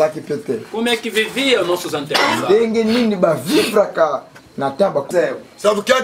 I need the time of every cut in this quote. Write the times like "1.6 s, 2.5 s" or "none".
5.1 s